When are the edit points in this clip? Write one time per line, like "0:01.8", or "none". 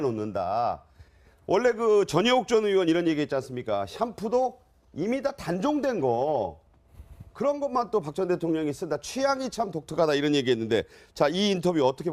none

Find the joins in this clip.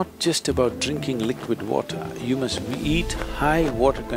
none

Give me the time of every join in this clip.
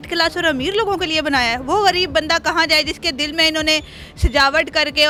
none

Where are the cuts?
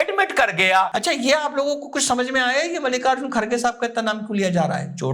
0:00.9

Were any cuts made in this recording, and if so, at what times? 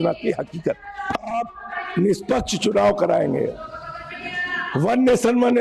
0:01.0

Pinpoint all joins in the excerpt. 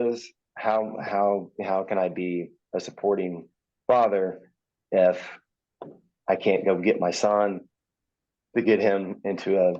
none

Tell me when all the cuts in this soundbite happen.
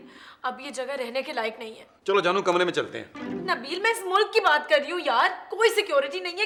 none

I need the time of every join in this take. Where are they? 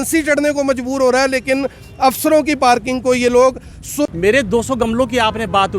0:04.1

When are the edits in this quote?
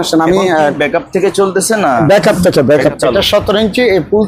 0:02.9

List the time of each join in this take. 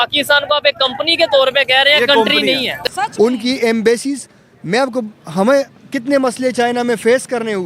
0:02.7

